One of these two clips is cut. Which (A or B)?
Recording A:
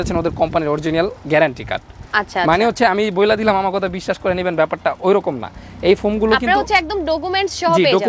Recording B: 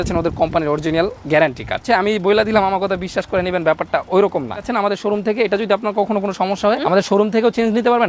B